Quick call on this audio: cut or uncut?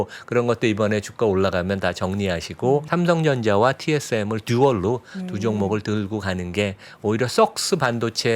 cut